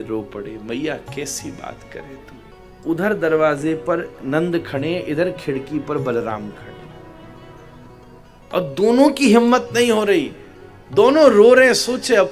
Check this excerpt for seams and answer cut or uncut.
cut